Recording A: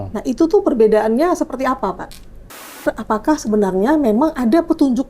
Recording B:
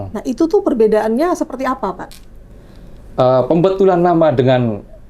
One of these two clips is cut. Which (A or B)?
A